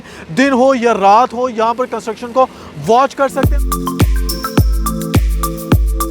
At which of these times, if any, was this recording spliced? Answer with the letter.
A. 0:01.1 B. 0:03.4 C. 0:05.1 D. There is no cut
B